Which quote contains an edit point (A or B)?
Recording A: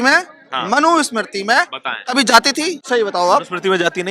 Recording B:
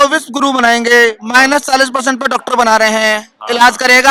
A